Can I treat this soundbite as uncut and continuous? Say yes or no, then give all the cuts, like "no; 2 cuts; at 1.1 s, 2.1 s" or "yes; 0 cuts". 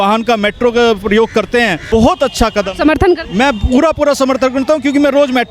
no; 1 cut; at 1.8 s